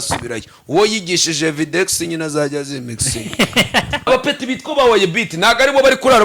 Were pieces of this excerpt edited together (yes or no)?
yes